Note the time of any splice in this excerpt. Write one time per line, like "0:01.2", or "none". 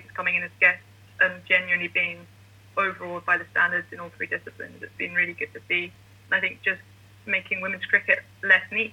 none